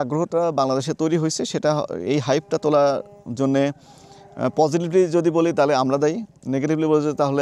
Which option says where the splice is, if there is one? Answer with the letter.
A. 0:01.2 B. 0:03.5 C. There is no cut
C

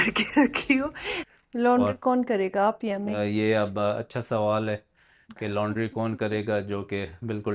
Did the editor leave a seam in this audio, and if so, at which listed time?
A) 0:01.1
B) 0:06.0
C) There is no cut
A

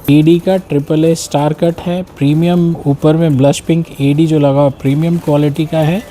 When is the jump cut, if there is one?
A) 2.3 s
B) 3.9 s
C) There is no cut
C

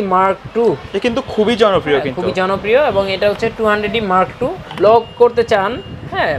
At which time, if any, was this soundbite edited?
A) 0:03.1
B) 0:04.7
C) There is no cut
B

